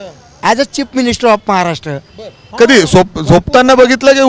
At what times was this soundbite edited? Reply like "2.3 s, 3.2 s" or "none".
2.4 s

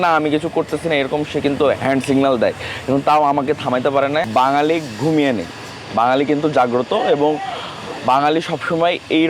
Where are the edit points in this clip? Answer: 4.2 s

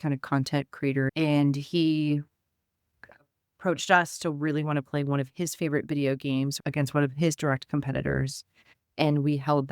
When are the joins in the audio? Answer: 1.1 s, 6.6 s

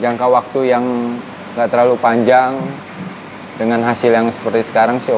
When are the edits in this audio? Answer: none

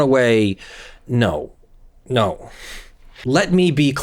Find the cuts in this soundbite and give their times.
3.1 s

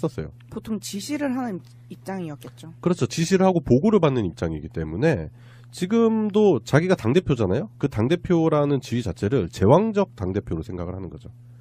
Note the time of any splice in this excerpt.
none

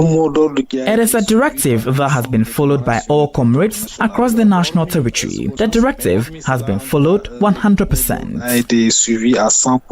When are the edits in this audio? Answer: 5.5 s

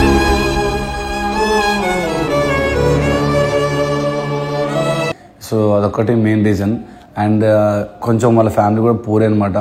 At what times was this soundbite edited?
none

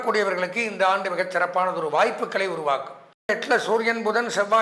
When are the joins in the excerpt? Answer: 3.3 s

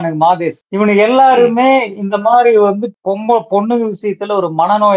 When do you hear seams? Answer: none

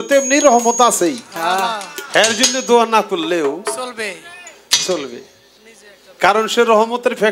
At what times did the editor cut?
none

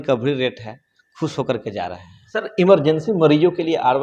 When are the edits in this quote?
none

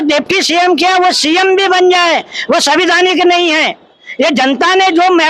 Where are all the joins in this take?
none

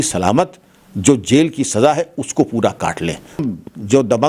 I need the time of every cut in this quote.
3.4 s

